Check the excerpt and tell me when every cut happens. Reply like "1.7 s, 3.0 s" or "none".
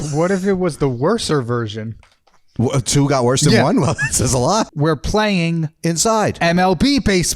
4.7 s